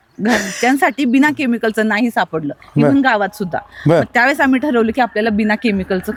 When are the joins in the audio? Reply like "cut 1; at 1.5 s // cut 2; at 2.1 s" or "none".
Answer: none